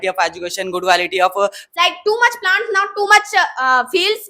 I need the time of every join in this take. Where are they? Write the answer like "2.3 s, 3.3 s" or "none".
1.6 s